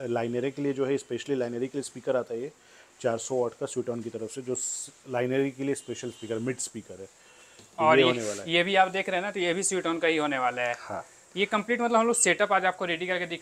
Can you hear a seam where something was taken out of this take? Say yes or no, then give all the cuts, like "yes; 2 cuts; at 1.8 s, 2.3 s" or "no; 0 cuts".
no; 0 cuts